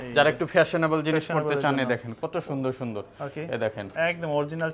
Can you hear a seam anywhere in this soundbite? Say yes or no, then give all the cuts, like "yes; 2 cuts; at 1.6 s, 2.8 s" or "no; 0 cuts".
no; 0 cuts